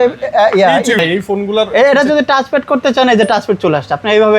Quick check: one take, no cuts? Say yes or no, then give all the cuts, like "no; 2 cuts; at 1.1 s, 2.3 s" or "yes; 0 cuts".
no; 1 cut; at 1.0 s